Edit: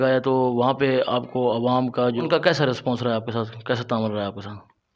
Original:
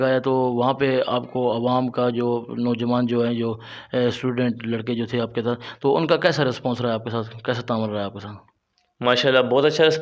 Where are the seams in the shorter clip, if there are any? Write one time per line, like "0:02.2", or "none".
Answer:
0:02.2